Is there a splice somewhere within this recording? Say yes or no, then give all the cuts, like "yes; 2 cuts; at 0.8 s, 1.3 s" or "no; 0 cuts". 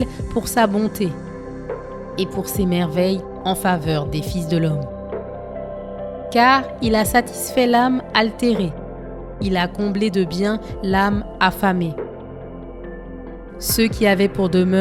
no; 0 cuts